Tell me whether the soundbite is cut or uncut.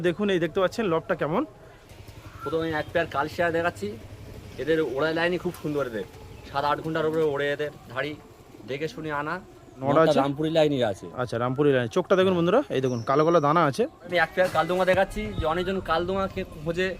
cut